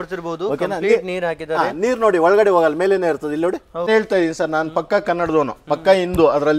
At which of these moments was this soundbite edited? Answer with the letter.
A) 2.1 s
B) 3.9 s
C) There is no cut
B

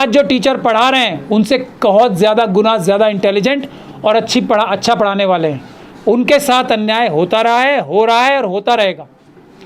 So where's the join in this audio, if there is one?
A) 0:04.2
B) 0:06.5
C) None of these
C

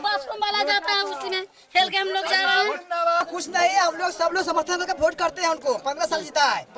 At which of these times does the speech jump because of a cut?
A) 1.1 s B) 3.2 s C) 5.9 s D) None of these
B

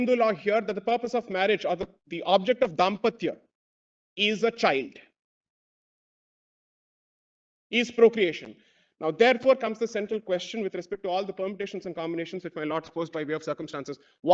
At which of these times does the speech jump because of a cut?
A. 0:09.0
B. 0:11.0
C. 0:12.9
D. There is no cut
D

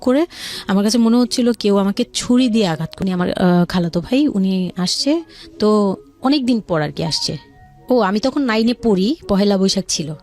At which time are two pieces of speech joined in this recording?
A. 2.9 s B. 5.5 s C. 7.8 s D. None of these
A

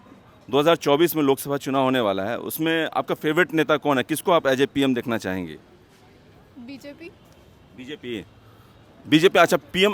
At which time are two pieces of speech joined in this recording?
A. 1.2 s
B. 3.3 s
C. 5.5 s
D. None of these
C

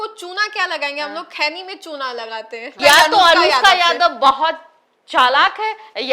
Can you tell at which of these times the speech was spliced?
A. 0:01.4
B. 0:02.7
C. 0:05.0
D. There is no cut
B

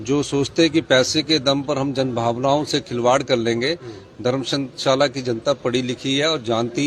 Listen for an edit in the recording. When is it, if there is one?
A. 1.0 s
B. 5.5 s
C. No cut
C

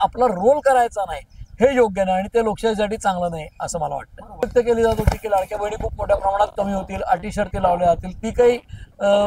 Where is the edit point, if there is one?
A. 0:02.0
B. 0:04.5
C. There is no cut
B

